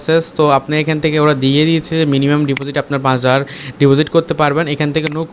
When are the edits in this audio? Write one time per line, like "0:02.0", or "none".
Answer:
none